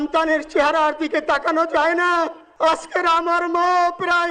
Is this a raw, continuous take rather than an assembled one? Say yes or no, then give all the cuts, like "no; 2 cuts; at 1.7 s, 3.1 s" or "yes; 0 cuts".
no; 1 cut; at 2.4 s